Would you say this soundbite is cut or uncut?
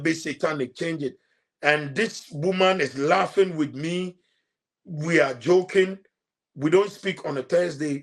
uncut